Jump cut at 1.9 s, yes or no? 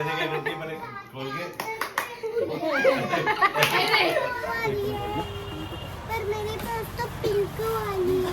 no